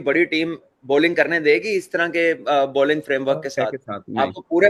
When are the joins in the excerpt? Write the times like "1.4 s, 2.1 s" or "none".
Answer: none